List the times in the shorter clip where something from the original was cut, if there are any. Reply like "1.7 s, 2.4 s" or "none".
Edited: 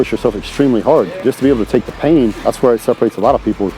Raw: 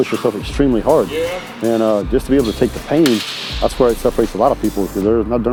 1.2 s, 2.4 s